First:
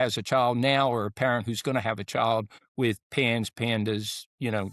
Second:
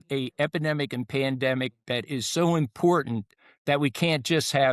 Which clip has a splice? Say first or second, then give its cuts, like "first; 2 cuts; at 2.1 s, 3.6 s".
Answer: first; 1 cut; at 2.6 s